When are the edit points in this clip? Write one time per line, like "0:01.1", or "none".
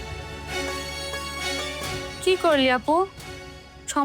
0:01.0